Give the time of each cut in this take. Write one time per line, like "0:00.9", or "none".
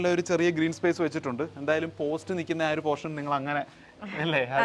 none

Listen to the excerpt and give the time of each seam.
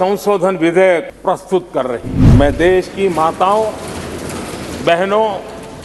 0:01.1
0:02.1

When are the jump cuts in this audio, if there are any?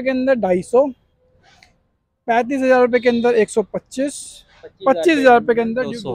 none

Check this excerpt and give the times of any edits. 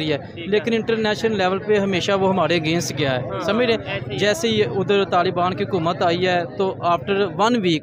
none

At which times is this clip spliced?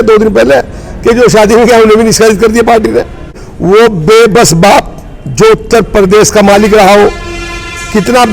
0:03.2

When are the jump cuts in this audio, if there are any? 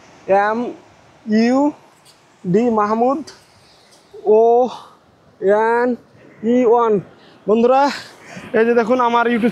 none

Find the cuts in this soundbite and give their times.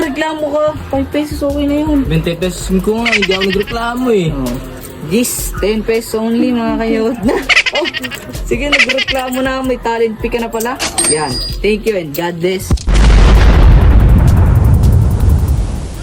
none

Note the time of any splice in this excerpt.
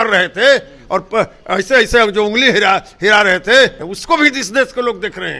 0:03.9

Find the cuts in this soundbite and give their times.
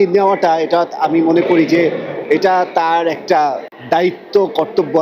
0:03.7

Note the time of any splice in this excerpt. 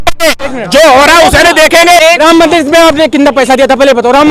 0:02.0

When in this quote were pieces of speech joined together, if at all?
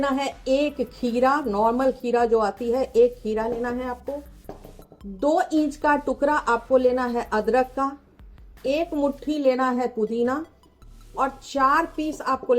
none

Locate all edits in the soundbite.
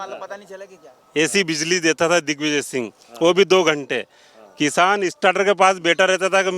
none

